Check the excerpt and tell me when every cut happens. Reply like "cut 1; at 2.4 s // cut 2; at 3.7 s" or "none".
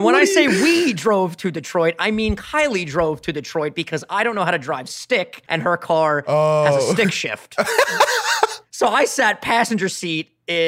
cut 1; at 5.4 s // cut 2; at 8.6 s